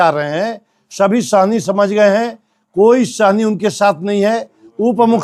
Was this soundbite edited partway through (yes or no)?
no